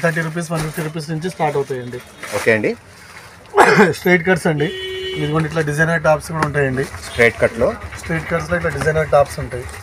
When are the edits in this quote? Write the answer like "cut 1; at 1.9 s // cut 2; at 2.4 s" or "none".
none